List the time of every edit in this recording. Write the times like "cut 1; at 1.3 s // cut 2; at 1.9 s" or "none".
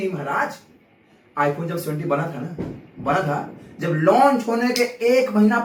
none